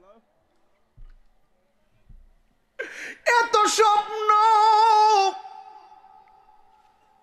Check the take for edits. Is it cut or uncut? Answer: uncut